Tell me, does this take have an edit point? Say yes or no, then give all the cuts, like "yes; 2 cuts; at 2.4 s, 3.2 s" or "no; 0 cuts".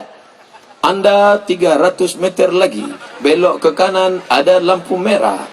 no; 0 cuts